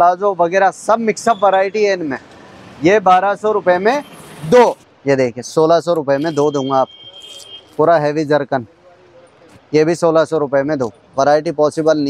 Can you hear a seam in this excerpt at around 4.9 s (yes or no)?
yes